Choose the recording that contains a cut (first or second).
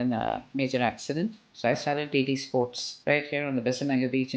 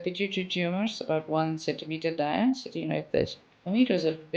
first